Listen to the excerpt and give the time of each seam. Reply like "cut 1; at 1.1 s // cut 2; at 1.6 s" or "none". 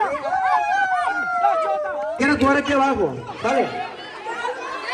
cut 1; at 2.1 s